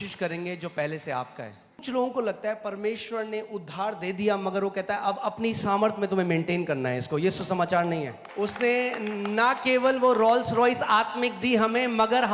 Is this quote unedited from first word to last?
no; 2 cuts; at 1.8 s, 8.2 s

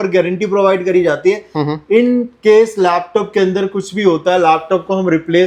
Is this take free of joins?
yes; 0 cuts

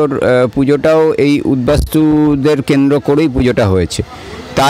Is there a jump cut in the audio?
no; 0 cuts

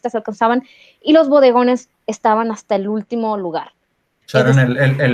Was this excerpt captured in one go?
yes; 0 cuts

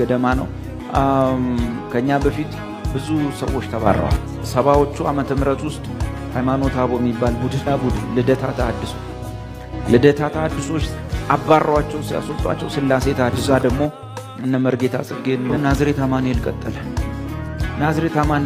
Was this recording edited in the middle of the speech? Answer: yes; 3 cuts; at 7.7 s, 13.4 s, 15.5 s

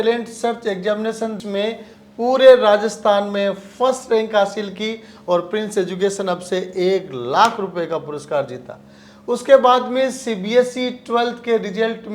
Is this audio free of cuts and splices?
yes; 0 cuts

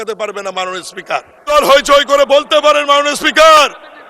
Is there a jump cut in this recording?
yes; 1 cut; at 1.5 s

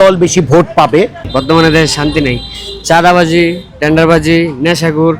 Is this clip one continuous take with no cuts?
no; 1 cut; at 1.3 s

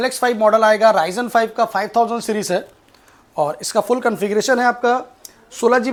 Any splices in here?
no; 0 cuts

